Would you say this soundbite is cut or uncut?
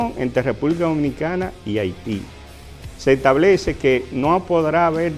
uncut